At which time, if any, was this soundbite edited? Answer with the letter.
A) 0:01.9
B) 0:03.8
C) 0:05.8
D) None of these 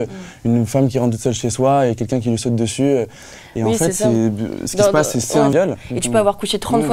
C